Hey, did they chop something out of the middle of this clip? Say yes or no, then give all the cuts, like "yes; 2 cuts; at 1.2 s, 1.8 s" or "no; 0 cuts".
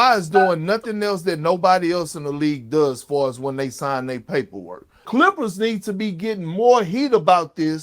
yes; 1 cut; at 5.1 s